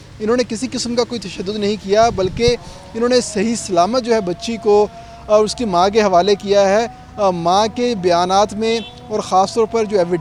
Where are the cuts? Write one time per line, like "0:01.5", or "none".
none